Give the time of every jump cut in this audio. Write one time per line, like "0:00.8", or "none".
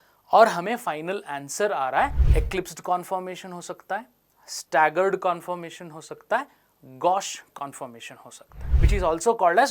0:02.2
0:08.7